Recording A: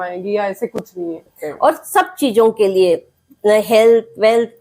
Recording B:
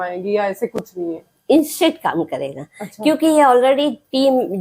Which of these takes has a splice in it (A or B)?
A